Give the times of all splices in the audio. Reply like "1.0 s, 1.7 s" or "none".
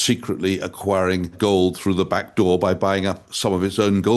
1.3 s